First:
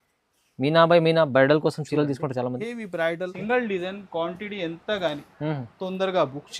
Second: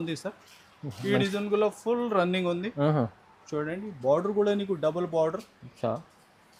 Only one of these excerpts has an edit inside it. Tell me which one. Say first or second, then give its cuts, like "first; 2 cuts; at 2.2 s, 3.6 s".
first; 1 cut; at 3.4 s